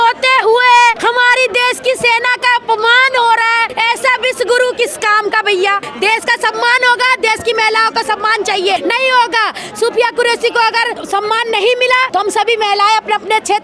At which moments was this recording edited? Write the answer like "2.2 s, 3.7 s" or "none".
1.0 s, 3.7 s, 5.9 s, 8.8 s, 11.0 s, 12.1 s